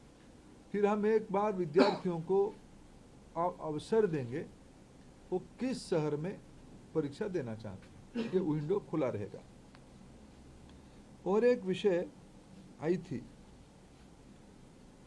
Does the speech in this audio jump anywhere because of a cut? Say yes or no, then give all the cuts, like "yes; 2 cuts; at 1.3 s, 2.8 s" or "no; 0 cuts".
no; 0 cuts